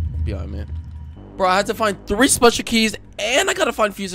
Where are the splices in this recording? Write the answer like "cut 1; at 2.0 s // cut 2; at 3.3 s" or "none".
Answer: cut 1; at 1.2 s